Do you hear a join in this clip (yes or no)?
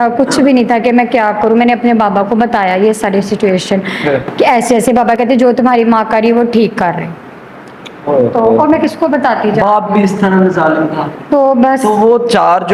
no